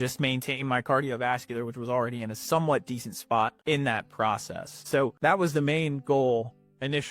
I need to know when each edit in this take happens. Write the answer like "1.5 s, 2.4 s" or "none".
3.6 s, 5.2 s